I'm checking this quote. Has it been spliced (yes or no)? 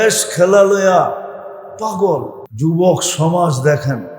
yes